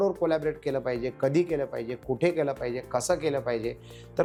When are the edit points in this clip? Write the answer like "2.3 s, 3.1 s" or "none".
none